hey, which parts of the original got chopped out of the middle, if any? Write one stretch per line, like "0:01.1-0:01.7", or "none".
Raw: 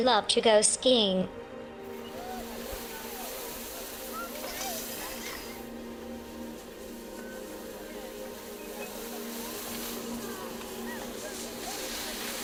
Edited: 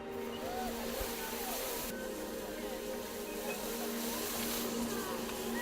0:03.6-0:07.2

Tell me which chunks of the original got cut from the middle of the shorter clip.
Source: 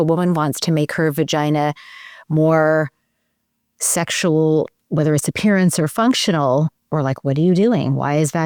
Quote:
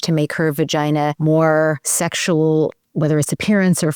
0:01.8-0:02.3
0:03.0-0:03.8

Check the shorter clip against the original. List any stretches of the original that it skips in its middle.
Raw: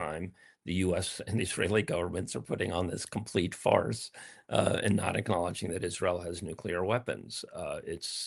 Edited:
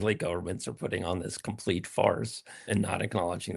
0:04.3-0:04.8

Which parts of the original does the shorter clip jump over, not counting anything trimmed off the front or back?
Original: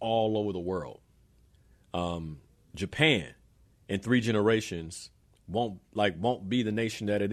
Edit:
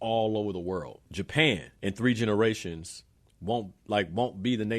0:01.0-0:02.6
0:03.3-0:03.8

